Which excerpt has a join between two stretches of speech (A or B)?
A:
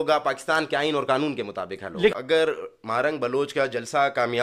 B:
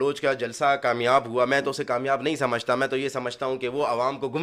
A